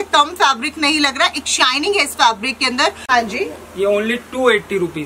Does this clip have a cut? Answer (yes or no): yes